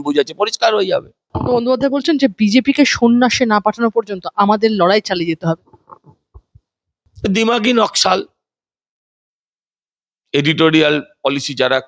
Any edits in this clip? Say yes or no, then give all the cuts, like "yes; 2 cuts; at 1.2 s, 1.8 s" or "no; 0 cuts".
yes; 2 cuts; at 1.2 s, 7.0 s